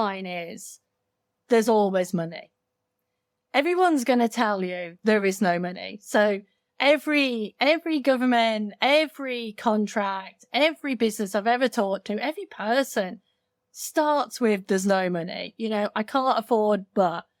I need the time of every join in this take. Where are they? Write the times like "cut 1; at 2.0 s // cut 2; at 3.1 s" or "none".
none